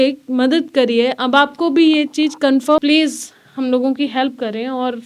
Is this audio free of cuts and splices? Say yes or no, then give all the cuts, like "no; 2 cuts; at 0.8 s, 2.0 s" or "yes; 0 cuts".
no; 1 cut; at 2.8 s